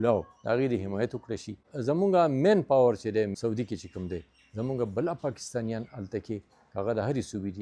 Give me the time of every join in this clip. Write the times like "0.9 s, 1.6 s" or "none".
1.7 s, 3.4 s